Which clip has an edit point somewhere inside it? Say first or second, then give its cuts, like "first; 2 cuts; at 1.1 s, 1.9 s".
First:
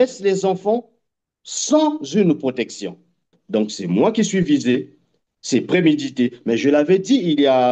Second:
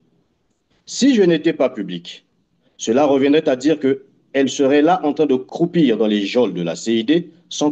first; 1 cut; at 3.3 s